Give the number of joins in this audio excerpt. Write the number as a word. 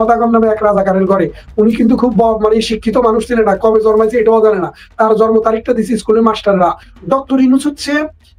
one